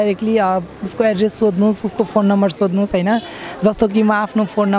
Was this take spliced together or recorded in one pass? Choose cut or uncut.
uncut